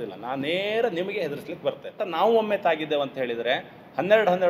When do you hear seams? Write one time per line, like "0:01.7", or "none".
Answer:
0:02.0